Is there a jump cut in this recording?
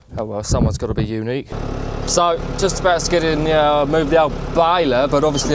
yes; 1 cut; at 1.6 s

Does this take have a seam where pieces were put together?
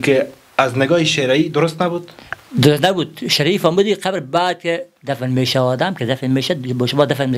no; 0 cuts

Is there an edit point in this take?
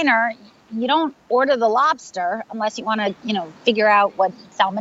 no; 0 cuts

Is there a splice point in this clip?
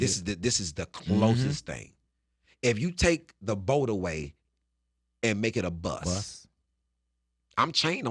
no; 0 cuts

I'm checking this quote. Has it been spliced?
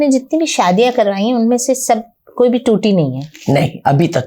no; 0 cuts

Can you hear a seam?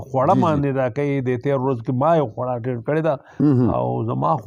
no; 0 cuts

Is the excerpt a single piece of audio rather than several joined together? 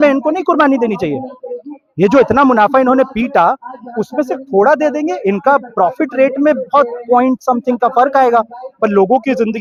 yes; 0 cuts

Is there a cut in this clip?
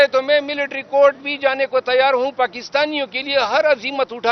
no; 0 cuts

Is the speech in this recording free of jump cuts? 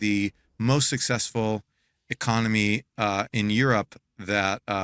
yes; 0 cuts

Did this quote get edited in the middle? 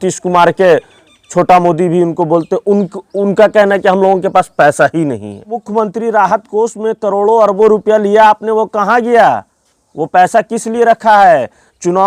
yes; 1 cut; at 5.5 s

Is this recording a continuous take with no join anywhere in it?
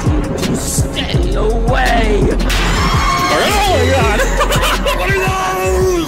yes; 0 cuts

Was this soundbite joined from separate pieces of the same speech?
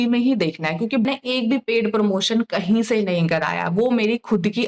yes; 1 cut; at 1.1 s

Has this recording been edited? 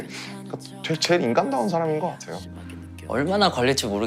yes; 1 cut; at 2.5 s

